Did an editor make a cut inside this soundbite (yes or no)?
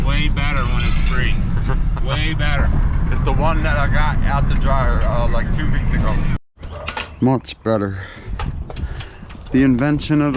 yes